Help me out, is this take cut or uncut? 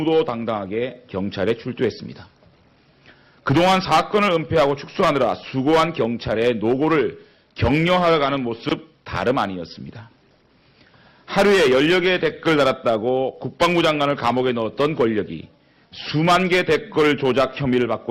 uncut